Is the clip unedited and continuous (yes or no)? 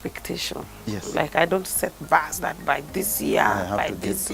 yes